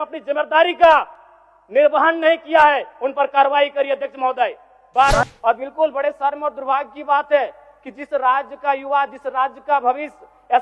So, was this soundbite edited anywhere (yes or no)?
yes